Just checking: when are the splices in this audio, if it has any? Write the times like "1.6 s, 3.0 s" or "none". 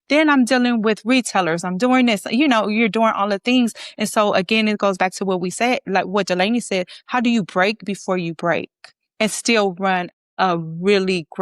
10.2 s